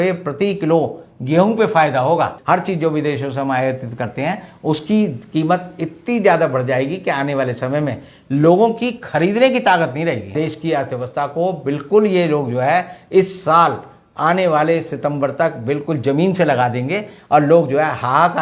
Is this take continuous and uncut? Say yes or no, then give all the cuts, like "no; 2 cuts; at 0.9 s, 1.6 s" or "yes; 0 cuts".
no; 2 cuts; at 2.4 s, 10.3 s